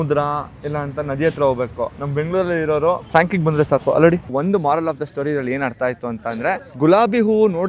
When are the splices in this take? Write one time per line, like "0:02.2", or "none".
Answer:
0:04.3